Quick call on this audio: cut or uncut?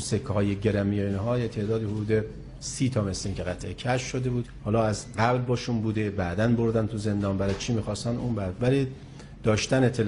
cut